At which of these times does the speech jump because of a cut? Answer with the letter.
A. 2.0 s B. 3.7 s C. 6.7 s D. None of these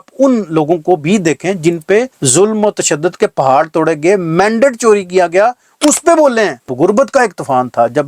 C